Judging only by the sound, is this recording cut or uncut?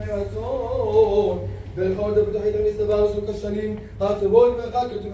uncut